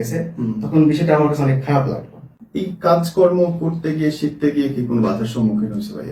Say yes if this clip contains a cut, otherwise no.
no